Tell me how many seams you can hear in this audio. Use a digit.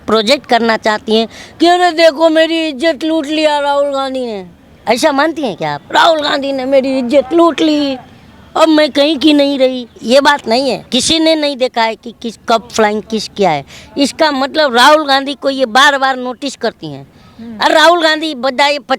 2